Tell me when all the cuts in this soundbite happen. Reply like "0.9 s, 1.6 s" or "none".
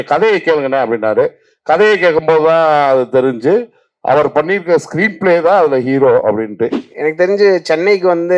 6.8 s